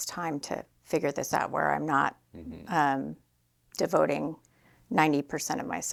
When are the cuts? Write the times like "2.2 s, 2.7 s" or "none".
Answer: none